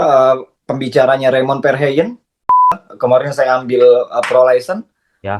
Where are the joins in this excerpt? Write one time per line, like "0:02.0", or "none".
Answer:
0:02.7